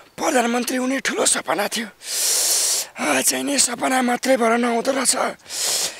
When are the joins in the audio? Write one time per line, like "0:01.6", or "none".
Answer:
none